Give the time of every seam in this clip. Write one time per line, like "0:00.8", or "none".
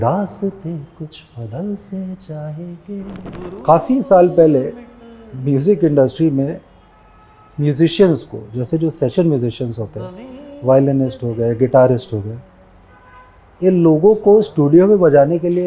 0:03.3